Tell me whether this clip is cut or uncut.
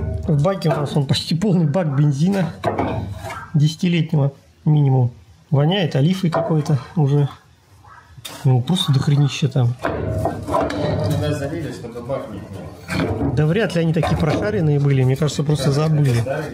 uncut